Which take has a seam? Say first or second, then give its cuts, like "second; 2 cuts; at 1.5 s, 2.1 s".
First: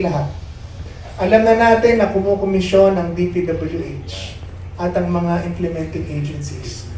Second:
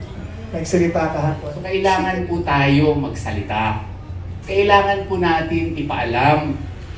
second; 1 cut; at 1.5 s